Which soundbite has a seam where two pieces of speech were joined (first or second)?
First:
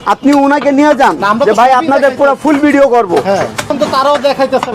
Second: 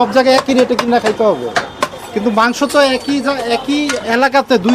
first